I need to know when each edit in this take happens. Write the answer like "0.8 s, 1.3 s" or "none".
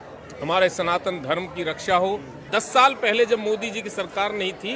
2.5 s